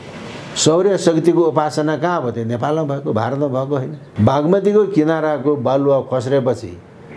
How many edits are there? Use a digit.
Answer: 1